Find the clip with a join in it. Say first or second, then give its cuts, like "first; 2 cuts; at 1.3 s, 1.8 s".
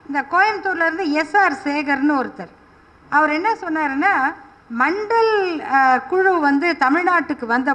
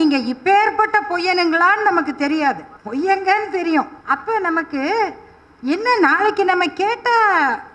second; 2 cuts; at 2.7 s, 4.0 s